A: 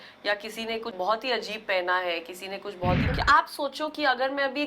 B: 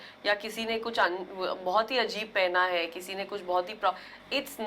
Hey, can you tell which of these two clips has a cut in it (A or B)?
A